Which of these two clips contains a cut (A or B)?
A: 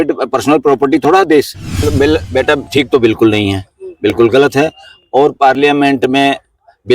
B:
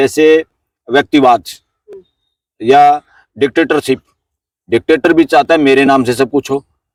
A